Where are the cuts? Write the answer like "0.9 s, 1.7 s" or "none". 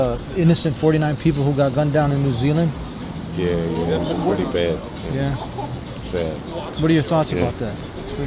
none